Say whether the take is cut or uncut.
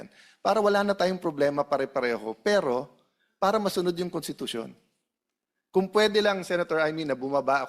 uncut